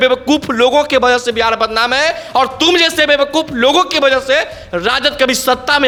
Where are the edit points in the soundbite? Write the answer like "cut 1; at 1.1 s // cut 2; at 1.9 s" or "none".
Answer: none